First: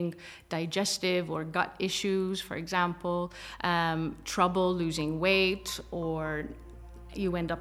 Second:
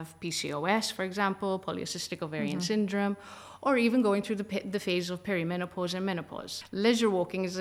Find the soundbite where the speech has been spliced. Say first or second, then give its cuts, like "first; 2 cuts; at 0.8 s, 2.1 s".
second; 1 cut; at 6.6 s